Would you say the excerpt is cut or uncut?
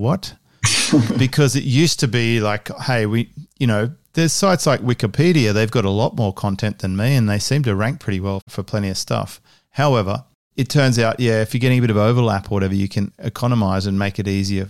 cut